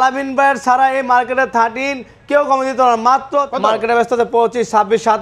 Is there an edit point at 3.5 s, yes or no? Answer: yes